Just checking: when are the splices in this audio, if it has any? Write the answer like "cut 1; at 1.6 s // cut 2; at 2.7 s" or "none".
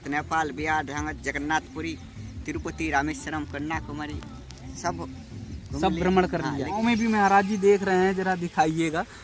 cut 1; at 6.8 s